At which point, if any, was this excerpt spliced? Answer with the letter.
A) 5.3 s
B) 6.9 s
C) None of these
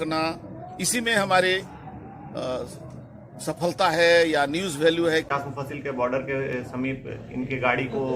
A